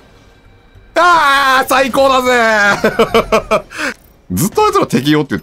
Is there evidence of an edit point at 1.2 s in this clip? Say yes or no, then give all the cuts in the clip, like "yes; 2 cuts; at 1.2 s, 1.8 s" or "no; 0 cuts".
no; 1 cut; at 3.8 s